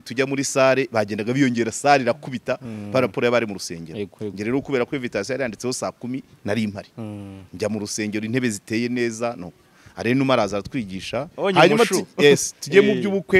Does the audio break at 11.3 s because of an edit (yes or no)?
yes